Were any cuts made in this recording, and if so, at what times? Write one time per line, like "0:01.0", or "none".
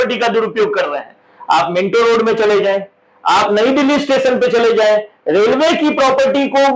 none